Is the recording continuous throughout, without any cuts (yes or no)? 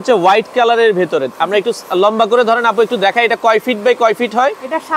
yes